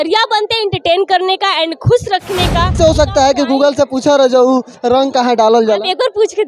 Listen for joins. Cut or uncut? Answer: cut